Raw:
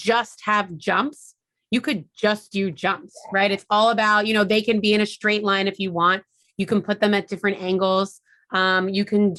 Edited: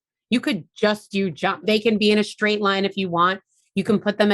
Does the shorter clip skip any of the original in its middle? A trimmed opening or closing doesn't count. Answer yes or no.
yes